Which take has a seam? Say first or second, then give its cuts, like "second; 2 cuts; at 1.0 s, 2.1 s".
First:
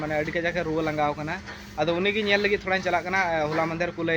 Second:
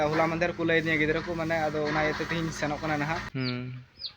second; 1 cut; at 3.3 s